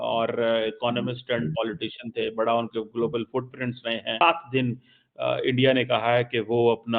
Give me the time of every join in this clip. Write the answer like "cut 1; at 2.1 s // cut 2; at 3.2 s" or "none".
cut 1; at 4.2 s